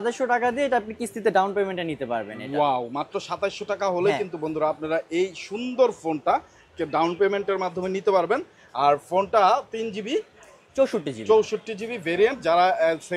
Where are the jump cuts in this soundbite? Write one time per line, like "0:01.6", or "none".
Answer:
none